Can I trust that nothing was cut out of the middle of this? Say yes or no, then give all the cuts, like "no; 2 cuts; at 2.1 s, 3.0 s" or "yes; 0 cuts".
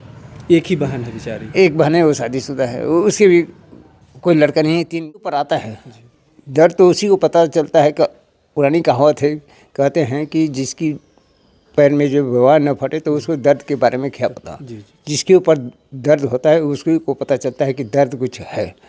no; 1 cut; at 5.1 s